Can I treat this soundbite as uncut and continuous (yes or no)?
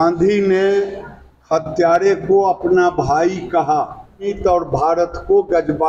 no